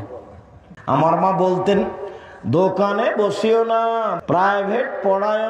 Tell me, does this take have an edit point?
yes; 2 cuts; at 1.0 s, 4.1 s

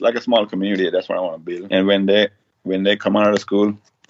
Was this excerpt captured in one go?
no; 1 cut; at 1.5 s

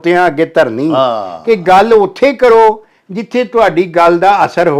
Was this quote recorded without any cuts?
yes; 0 cuts

